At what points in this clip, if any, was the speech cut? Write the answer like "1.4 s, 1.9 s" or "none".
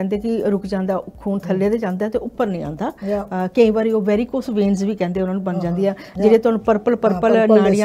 none